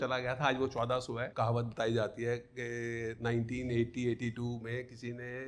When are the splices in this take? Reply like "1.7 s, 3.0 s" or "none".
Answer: 1.3 s